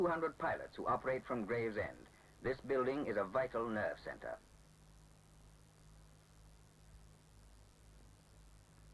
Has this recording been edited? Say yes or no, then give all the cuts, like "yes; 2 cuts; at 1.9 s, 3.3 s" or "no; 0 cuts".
yes; 1 cut; at 2.5 s